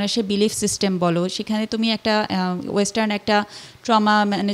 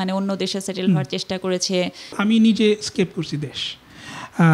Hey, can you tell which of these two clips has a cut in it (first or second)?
second